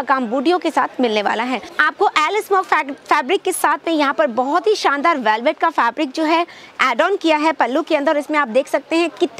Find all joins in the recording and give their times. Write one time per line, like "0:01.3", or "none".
0:01.7